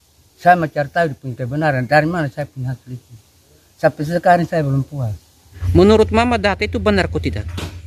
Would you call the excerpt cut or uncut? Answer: cut